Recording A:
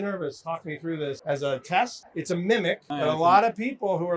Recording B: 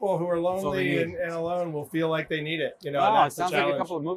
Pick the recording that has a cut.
A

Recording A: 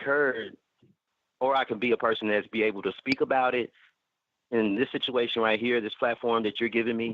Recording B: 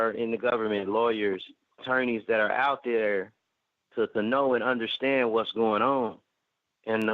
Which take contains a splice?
B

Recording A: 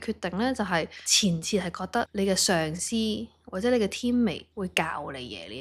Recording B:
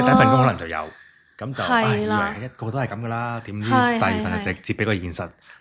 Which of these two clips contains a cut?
A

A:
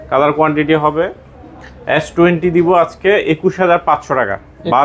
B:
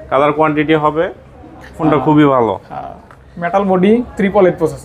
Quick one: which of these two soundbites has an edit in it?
B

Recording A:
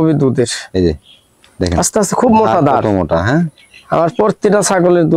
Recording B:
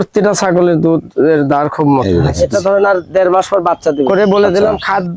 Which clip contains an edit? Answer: B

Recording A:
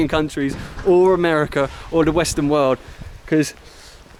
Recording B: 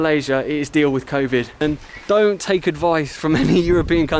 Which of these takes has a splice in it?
B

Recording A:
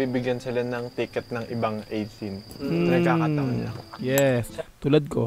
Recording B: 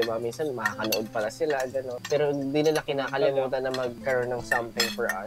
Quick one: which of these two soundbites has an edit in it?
B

